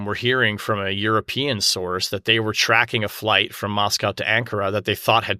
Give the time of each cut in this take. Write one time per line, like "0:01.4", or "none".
none